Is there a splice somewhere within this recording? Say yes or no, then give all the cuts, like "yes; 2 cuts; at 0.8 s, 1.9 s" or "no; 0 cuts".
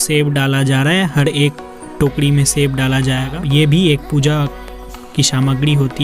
yes; 1 cut; at 3.3 s